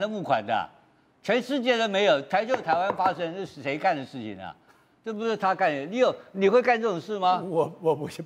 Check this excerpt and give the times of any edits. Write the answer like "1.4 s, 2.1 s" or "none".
none